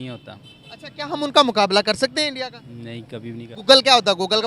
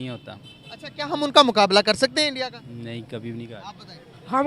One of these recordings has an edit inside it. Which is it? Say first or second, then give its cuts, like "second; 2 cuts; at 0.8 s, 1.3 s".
first; 1 cut; at 3.5 s